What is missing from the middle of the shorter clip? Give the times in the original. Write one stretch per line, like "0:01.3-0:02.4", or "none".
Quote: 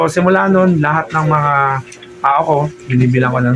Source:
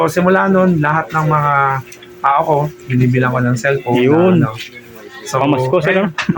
none